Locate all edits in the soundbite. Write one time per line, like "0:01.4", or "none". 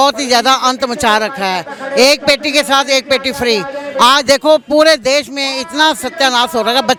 none